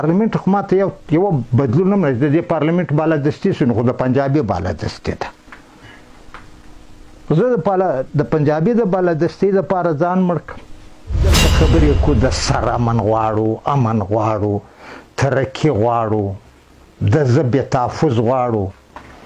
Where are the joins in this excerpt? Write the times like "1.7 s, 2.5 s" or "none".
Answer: 11.4 s